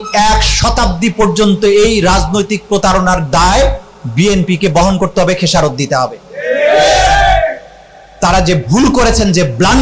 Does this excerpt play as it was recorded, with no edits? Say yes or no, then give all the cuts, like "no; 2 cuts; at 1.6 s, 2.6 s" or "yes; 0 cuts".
yes; 0 cuts